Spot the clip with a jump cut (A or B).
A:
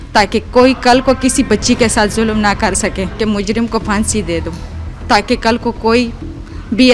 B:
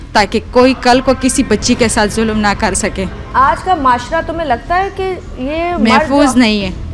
A